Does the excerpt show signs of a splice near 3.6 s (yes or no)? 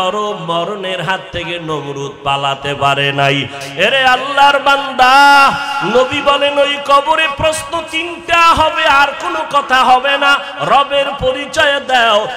yes